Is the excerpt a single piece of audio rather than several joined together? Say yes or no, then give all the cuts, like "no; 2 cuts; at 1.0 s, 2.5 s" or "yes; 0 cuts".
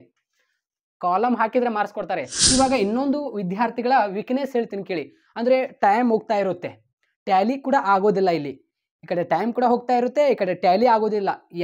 no; 1 cut; at 2.3 s